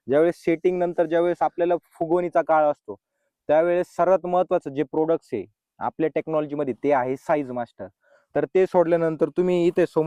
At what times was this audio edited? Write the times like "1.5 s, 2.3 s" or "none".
none